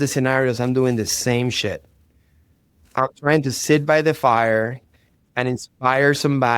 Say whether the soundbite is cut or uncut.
uncut